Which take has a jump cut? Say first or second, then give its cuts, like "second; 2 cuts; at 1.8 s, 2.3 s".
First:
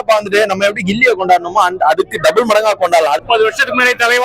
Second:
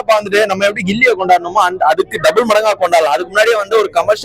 first; 1 cut; at 3.2 s